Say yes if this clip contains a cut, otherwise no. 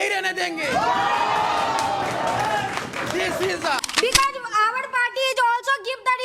yes